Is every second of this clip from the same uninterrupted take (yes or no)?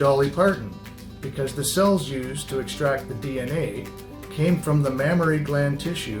yes